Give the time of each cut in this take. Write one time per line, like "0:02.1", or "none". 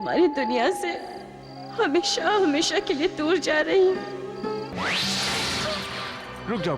0:04.7